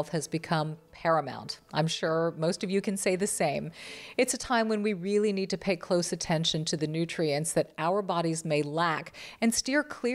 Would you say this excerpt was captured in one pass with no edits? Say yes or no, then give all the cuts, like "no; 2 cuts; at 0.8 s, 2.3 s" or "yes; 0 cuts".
yes; 0 cuts